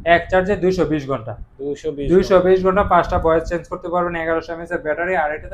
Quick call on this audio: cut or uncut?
uncut